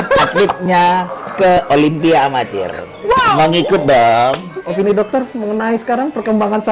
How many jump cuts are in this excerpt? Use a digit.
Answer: 1